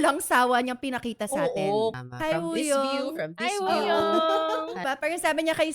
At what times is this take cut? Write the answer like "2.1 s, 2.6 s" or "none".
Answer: 2.0 s, 4.8 s